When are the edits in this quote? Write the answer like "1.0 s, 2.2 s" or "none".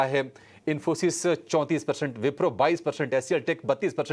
1.4 s